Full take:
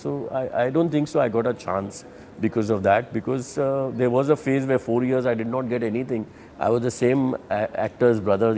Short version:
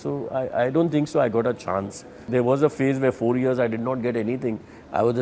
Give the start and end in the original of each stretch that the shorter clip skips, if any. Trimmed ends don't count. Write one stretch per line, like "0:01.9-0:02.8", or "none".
0:02.2-0:03.9